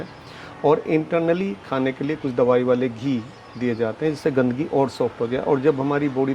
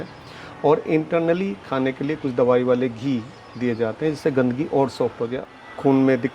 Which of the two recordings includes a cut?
second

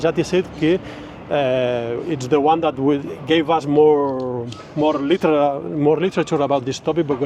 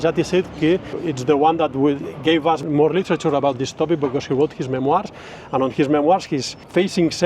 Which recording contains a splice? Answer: second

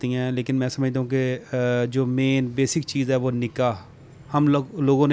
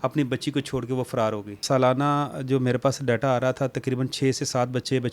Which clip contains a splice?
second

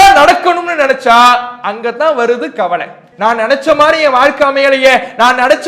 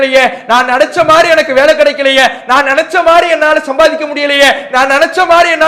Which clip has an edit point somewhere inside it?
first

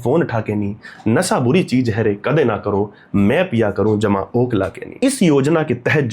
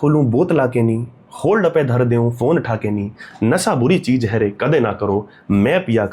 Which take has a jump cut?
first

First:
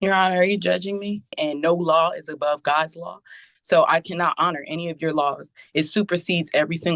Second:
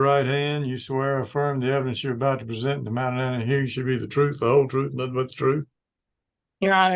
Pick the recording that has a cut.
first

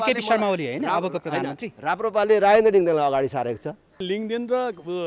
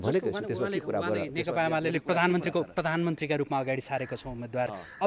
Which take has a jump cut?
first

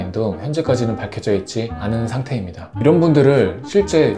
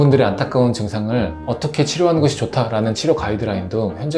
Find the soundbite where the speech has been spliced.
first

